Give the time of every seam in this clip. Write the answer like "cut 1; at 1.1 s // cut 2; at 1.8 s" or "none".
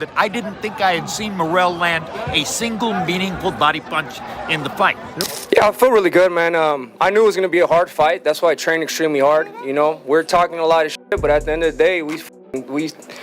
cut 1; at 5.2 s